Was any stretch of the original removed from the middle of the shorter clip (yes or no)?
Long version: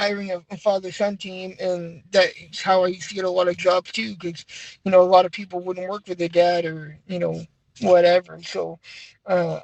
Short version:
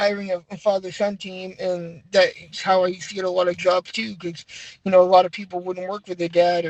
no